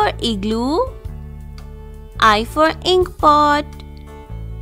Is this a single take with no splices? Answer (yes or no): yes